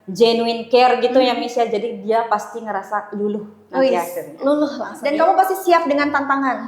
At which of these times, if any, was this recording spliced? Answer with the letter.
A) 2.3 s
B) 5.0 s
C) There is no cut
B